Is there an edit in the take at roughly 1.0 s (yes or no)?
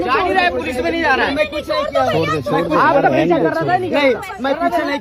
no